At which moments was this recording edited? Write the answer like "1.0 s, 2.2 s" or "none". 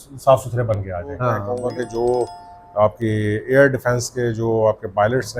1.5 s